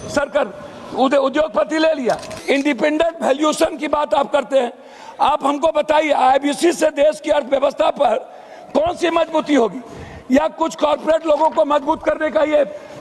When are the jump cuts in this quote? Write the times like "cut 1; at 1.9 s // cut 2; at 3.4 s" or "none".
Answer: cut 1; at 2.3 s